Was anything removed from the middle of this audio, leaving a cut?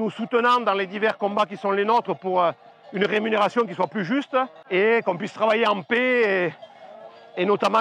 yes; 1 cut; at 4.6 s

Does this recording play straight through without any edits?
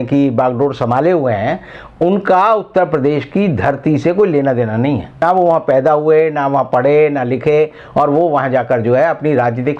yes; 0 cuts

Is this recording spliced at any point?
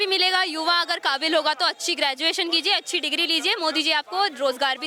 no; 0 cuts

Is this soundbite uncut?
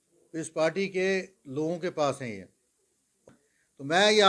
no; 1 cut; at 3.2 s

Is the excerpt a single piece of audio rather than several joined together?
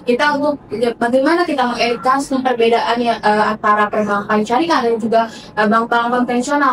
yes; 0 cuts

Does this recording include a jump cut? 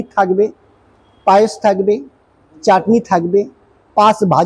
no; 0 cuts

